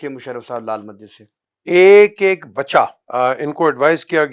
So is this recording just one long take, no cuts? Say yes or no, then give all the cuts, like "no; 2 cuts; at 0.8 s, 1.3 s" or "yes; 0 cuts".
no; 1 cut; at 3.0 s